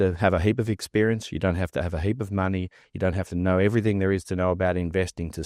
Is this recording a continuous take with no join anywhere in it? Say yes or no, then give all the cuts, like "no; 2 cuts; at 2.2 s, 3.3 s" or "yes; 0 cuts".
yes; 0 cuts